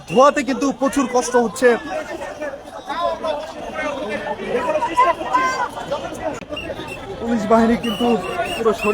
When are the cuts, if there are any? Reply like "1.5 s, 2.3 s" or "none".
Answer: 6.4 s